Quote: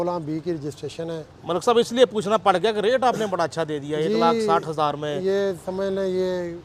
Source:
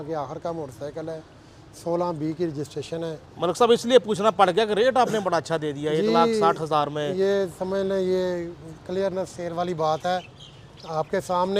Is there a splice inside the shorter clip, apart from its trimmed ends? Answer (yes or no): no